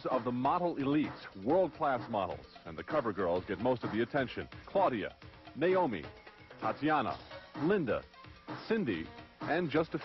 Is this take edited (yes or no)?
no